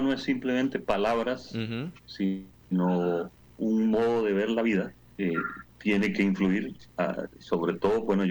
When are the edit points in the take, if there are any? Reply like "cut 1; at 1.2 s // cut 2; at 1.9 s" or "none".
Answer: cut 1; at 2.0 s // cut 2; at 5.1 s // cut 3; at 6.8 s